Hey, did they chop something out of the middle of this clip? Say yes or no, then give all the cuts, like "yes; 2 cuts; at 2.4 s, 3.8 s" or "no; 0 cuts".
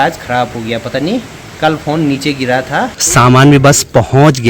yes; 1 cut; at 3.0 s